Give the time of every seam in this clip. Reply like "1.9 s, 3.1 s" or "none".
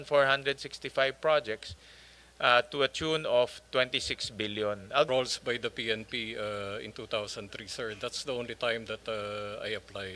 5.1 s